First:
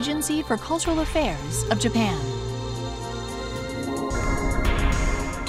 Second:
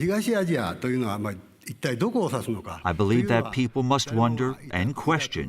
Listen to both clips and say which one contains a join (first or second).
second